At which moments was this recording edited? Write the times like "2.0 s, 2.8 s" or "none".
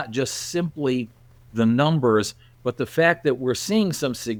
none